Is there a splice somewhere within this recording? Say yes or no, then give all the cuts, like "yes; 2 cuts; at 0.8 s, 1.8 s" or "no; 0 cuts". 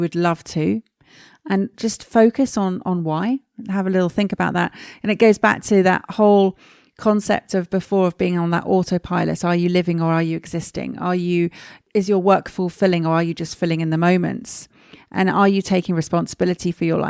yes; 1 cut; at 11.7 s